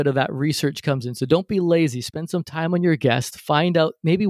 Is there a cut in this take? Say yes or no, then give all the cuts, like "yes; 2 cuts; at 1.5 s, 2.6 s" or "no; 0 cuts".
no; 0 cuts